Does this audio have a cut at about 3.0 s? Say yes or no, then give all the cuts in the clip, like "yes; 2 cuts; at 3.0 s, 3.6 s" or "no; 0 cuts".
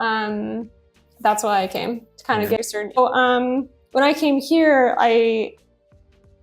yes; 1 cut; at 3.0 s